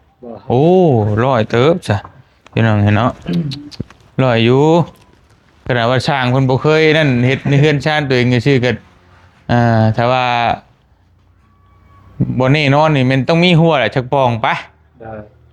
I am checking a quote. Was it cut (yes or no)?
no